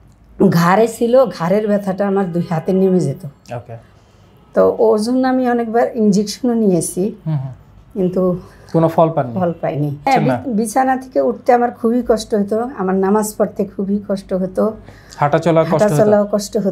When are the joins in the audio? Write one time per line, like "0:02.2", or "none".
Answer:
0:10.1